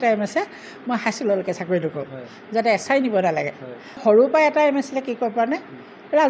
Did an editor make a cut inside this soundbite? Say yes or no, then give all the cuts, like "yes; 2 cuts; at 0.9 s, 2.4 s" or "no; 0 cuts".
yes; 1 cut; at 4.0 s